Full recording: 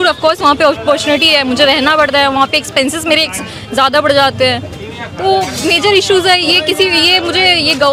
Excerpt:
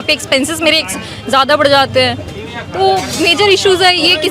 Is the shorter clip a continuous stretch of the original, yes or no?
yes